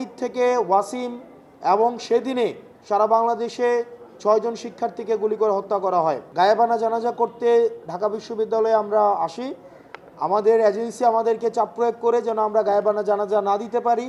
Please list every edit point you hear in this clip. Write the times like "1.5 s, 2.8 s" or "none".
6.2 s

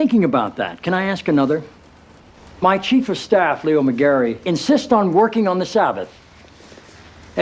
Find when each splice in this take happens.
1.9 s

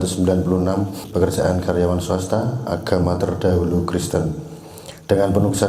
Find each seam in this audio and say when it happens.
1.0 s

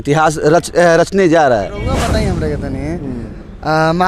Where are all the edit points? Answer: 2.0 s

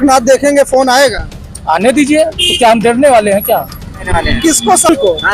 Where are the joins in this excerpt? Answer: 4.1 s

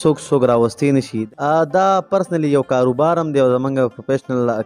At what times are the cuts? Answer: 1.2 s

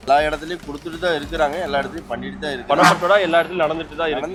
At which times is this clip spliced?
none

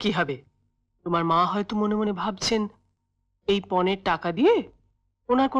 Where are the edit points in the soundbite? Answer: none

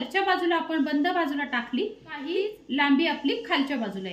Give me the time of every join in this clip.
2.3 s

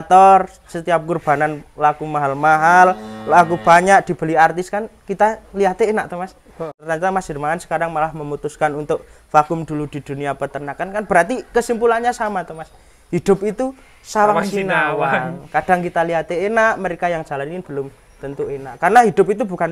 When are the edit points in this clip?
6.8 s

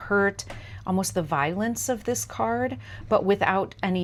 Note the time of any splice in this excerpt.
none

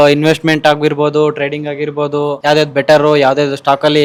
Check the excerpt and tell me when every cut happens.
none

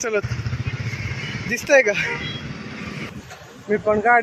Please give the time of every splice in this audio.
3.1 s

